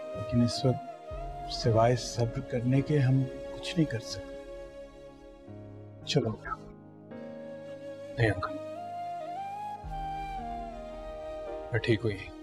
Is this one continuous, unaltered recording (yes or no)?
yes